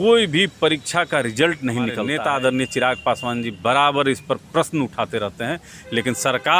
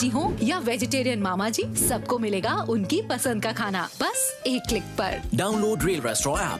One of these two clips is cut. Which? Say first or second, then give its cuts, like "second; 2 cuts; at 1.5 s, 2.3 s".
first; 1 cut; at 2.0 s